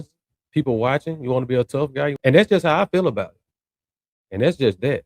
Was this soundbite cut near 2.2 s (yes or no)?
yes